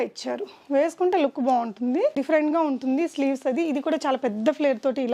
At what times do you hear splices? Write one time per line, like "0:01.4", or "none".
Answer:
0:02.2